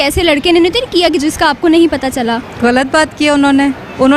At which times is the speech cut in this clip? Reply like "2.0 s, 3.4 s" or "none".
2.5 s